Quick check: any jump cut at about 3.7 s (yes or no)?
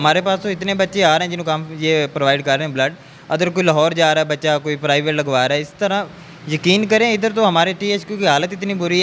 no